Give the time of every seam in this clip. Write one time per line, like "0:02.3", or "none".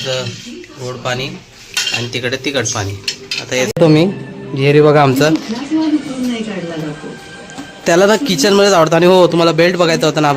0:03.7